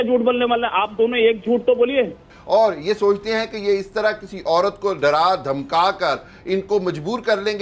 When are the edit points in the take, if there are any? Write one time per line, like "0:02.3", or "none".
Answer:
0:02.3

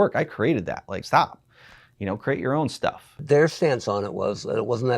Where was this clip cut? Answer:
0:00.9
0:03.2

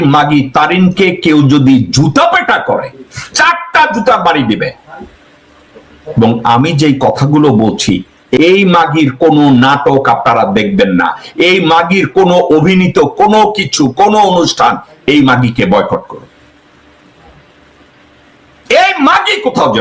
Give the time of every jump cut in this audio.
0:08.4

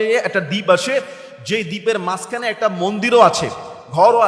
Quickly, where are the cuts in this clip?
none

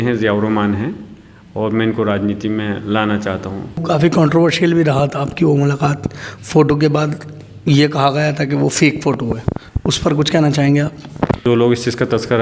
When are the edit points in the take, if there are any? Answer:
0:03.8
0:11.4

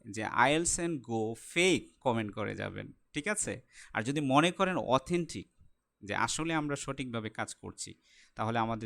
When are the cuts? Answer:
0:02.0

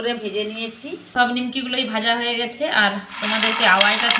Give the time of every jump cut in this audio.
0:01.1

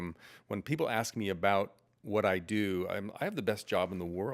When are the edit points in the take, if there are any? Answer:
none

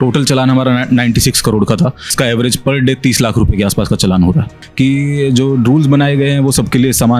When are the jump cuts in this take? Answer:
0:02.1
0:04.6

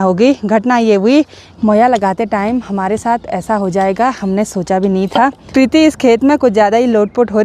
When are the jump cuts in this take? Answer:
0:01.4
0:05.5

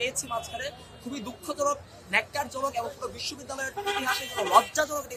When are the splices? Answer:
none

